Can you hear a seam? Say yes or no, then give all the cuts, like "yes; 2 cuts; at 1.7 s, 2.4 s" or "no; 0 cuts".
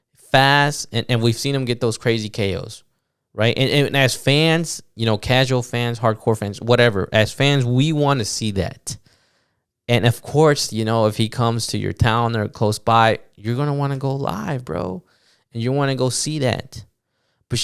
no; 0 cuts